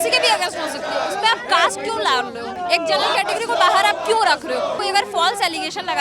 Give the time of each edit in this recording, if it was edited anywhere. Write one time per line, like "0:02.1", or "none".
0:02.5
0:04.8